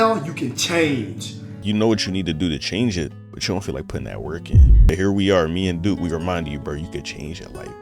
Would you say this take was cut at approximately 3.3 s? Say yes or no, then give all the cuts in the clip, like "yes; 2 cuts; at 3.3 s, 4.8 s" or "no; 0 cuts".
yes; 3 cuts; at 1.6 s, 3.3 s, 4.9 s